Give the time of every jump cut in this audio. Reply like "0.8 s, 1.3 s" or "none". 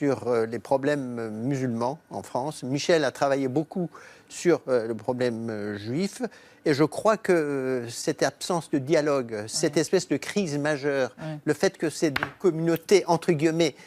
5.4 s